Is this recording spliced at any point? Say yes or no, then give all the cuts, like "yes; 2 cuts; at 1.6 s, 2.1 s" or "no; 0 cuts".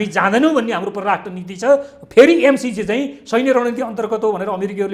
no; 0 cuts